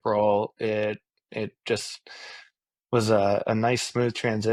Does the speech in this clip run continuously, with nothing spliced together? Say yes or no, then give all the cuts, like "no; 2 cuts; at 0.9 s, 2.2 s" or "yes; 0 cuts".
yes; 0 cuts